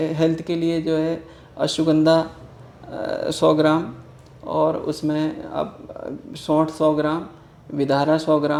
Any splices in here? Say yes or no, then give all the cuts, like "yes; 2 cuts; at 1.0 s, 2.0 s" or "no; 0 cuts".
no; 0 cuts